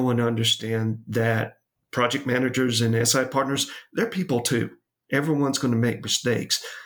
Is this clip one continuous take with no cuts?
yes; 0 cuts

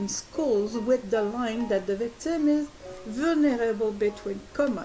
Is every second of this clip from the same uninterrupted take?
yes; 0 cuts

